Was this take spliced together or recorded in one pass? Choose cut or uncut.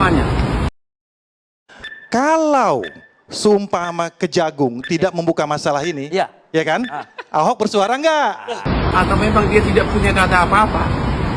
cut